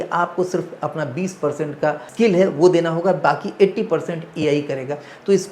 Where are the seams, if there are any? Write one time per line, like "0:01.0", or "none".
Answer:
0:02.1